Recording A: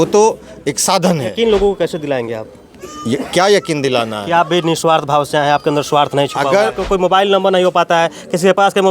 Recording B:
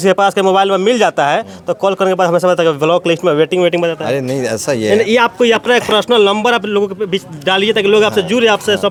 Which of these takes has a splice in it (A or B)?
A